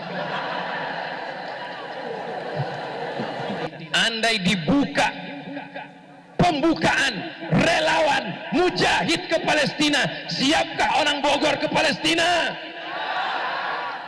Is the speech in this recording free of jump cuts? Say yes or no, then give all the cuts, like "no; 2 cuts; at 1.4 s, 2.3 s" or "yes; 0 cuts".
no; 1 cut; at 3.6 s